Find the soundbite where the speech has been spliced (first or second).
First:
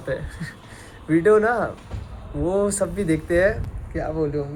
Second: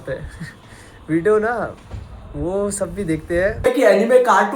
second